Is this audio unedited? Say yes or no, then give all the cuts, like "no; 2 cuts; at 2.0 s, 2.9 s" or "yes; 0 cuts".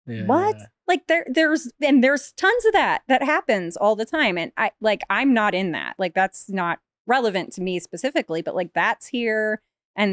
yes; 0 cuts